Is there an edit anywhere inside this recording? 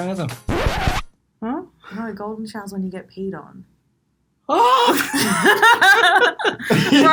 no; 0 cuts

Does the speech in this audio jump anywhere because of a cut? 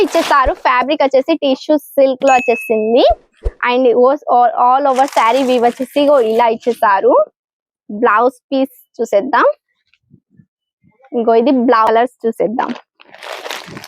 yes; 1 cut; at 11.9 s

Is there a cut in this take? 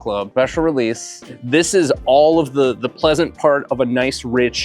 yes; 1 cut; at 1.3 s

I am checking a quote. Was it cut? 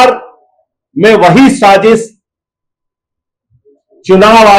no; 0 cuts

